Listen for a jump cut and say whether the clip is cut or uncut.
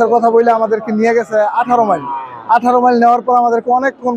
uncut